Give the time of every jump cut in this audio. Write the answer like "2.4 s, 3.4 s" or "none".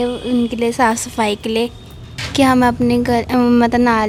none